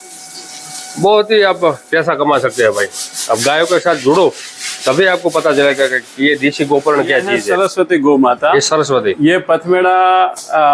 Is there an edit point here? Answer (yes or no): yes